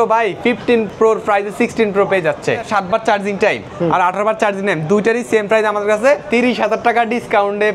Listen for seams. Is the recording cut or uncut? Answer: cut